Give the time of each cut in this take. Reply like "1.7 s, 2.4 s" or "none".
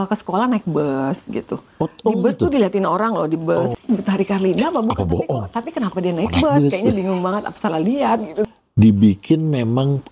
3.8 s, 8.4 s

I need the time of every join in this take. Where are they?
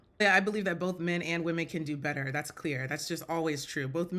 none

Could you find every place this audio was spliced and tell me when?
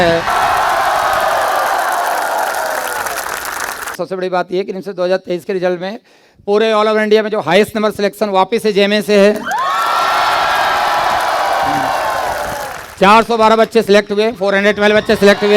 3.9 s

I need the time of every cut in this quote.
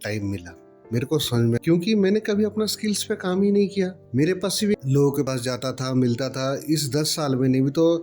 1.6 s, 4.7 s

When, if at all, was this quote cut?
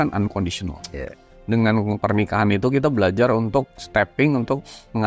1.2 s

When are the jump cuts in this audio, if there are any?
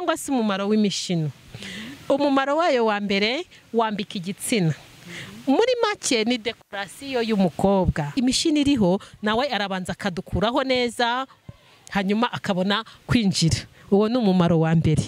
8.1 s

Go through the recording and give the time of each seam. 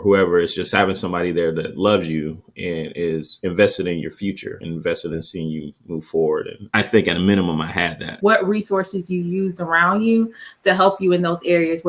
8.2 s

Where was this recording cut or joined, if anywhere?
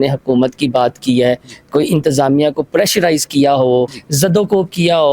4.0 s

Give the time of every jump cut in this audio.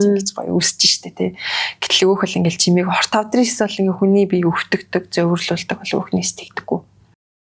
none

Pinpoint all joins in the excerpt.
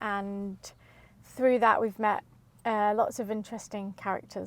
none

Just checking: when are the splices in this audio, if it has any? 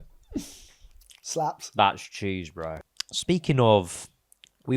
2.6 s

